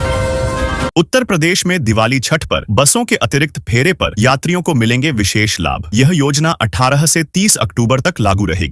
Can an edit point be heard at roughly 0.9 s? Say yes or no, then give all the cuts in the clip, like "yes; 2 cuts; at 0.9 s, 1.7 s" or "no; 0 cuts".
yes; 1 cut; at 0.9 s